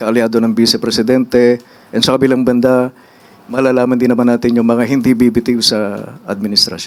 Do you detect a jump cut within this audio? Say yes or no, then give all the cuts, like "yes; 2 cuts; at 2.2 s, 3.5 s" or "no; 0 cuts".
no; 0 cuts